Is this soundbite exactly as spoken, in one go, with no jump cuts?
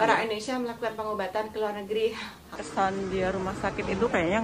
no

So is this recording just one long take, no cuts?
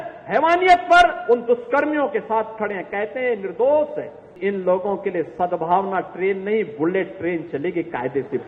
no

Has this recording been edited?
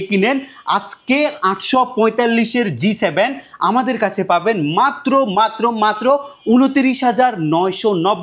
no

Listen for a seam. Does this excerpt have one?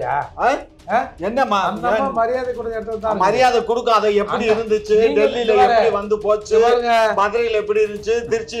no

